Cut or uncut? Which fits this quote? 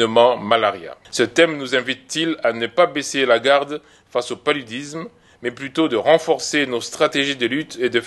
cut